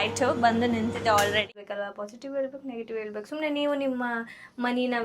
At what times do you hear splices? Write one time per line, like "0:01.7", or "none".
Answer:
0:01.5